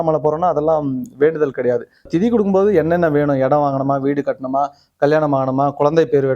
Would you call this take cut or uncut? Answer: cut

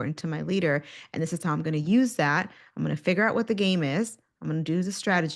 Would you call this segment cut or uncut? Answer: uncut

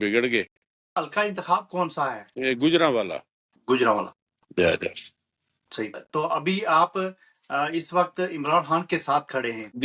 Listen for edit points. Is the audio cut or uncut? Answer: cut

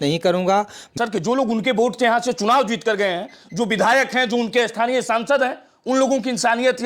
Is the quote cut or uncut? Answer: cut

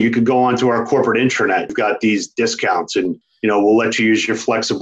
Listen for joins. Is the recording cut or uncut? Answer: cut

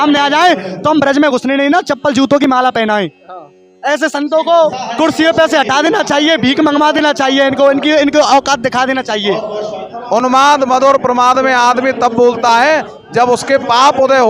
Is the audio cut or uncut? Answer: cut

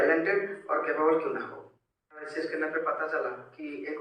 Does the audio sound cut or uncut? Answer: uncut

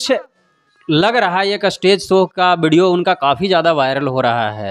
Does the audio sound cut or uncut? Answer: uncut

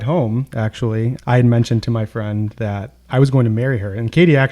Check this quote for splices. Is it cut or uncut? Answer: cut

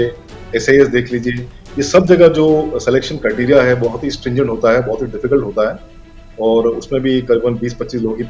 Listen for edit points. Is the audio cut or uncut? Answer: uncut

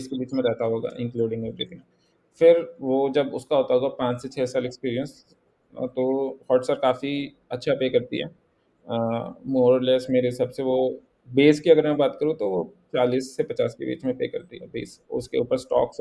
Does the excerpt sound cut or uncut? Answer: uncut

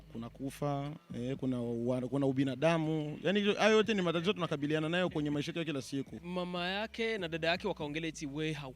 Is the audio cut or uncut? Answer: cut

